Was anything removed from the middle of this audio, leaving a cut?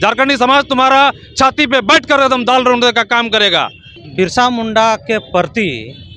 yes; 1 cut; at 4.0 s

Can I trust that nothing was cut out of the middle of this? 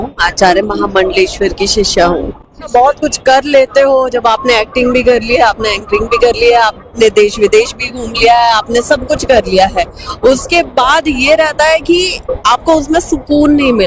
no; 1 cut; at 2.7 s

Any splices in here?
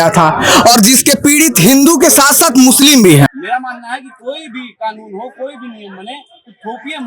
yes; 1 cut; at 3.3 s

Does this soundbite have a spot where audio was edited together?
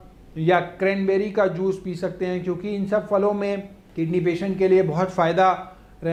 no; 0 cuts

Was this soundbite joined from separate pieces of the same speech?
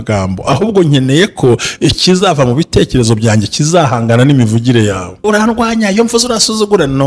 yes; 1 cut; at 5.2 s

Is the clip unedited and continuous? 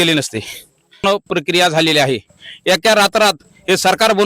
no; 1 cut; at 1.0 s

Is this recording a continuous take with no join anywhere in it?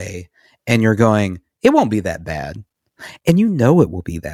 yes; 0 cuts

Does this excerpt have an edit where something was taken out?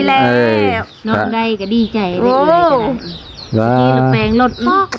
no; 0 cuts

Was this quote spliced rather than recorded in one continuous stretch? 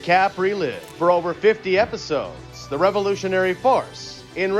no; 0 cuts

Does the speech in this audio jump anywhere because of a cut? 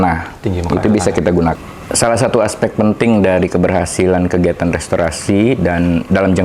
yes; 1 cut; at 1.6 s

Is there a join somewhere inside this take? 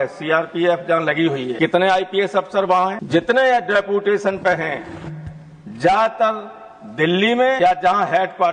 yes; 3 cuts; at 1.5 s, 3.0 s, 7.6 s

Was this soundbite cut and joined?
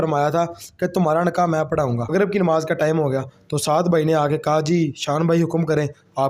yes; 1 cut; at 2.1 s

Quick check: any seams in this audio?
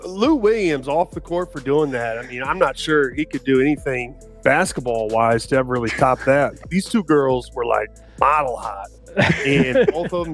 no; 0 cuts

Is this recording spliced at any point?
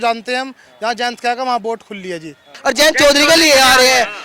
yes; 1 cut; at 2.5 s

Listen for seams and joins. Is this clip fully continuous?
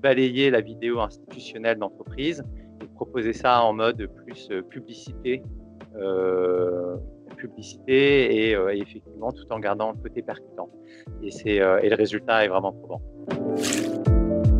no; 1 cut; at 13.2 s

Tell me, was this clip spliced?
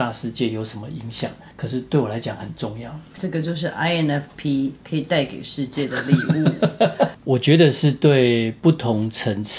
yes; 4 cuts; at 1.5 s, 3.1 s, 7.2 s, 8.5 s

